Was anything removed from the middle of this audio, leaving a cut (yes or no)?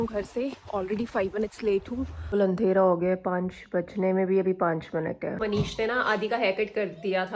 yes